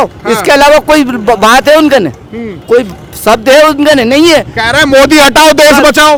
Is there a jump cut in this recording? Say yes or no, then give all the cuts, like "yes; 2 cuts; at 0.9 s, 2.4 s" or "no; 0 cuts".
no; 0 cuts